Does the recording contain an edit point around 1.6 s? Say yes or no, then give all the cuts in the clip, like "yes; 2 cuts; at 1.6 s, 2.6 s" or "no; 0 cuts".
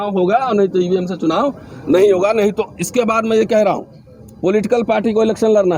no; 0 cuts